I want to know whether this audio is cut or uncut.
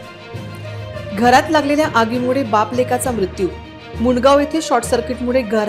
uncut